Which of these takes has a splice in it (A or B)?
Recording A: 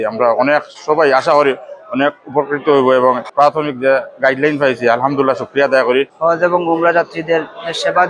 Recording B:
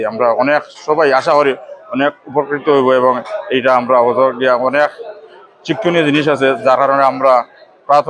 A